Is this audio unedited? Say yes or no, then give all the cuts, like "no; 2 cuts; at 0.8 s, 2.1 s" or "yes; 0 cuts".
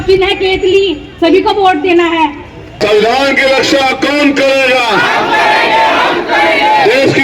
no; 1 cut; at 2.8 s